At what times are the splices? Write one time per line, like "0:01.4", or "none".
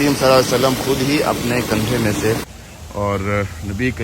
0:02.6